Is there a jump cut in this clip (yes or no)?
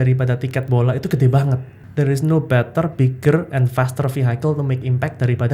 yes